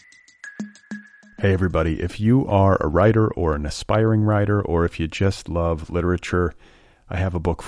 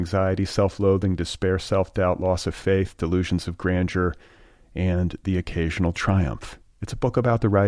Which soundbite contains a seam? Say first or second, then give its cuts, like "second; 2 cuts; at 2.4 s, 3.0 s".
first; 1 cut; at 1.0 s